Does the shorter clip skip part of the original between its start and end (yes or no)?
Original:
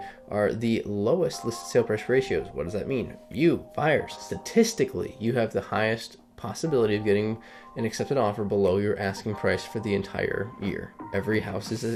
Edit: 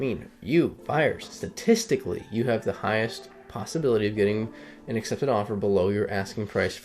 no